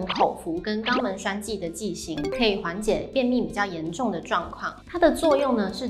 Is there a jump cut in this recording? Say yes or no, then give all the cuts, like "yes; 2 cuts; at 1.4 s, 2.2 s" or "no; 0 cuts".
no; 0 cuts